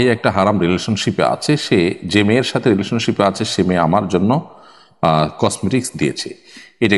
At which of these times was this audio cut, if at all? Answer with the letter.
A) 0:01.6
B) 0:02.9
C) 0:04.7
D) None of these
D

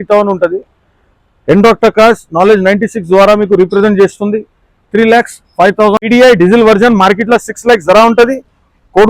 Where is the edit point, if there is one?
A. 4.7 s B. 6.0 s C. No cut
B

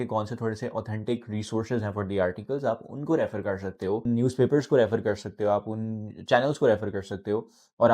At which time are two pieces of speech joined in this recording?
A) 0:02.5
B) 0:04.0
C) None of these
B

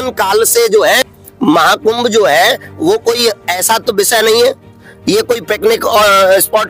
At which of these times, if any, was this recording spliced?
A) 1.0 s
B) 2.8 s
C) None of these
A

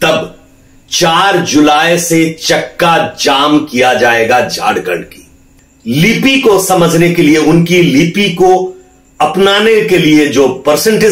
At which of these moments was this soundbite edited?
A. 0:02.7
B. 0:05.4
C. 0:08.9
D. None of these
B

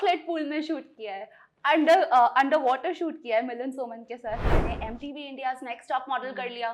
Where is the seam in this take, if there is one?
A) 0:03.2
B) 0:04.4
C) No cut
B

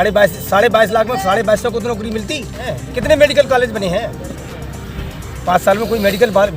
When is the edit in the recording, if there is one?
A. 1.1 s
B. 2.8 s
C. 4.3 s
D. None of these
B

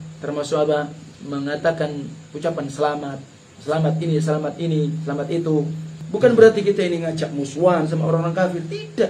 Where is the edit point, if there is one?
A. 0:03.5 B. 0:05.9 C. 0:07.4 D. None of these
B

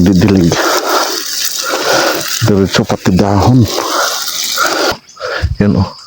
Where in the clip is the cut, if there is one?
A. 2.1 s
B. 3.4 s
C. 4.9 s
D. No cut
C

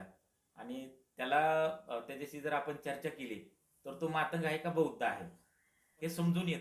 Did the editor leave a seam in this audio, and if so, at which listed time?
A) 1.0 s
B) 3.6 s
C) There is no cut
C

